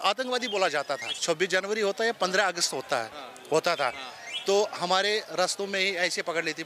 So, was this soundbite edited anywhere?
yes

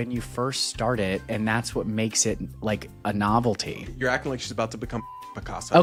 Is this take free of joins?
yes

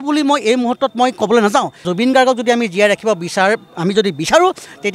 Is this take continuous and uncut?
no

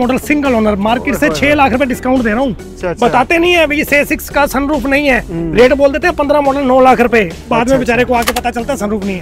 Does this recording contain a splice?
yes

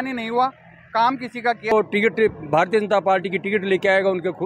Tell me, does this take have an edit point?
yes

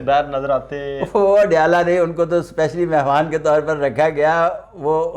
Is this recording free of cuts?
yes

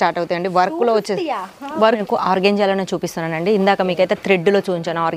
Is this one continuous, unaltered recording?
no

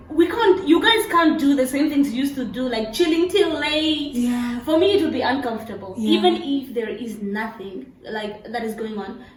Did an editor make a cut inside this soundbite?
no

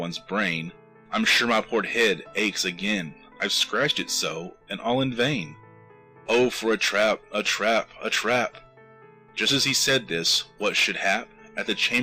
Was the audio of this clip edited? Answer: no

